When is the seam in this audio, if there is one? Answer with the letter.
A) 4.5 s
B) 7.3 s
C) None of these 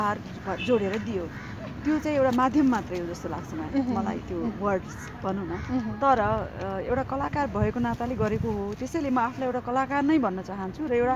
C